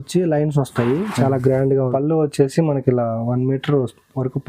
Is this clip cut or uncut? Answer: cut